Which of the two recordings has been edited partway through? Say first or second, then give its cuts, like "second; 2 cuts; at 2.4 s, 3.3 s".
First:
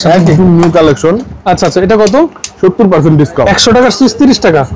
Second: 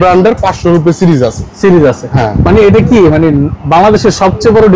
first; 2 cuts; at 1.3 s, 3.5 s